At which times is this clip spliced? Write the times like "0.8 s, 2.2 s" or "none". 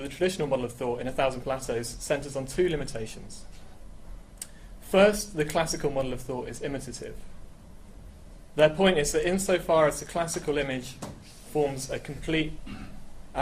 3.7 s